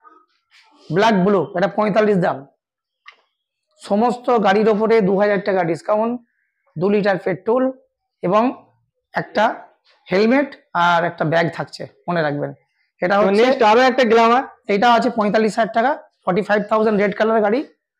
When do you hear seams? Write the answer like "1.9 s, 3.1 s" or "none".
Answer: none